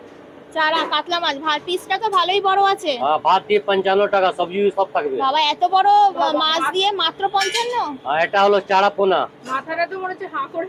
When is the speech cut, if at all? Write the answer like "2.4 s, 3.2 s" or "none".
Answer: none

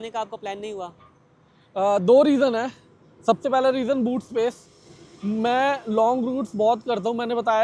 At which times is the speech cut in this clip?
none

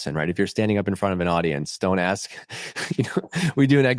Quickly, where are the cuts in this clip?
none

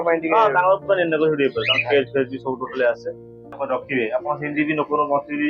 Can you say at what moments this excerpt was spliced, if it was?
3.6 s

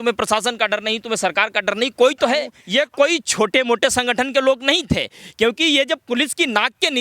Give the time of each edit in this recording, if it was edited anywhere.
2.6 s

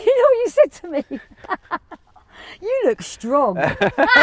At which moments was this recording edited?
none

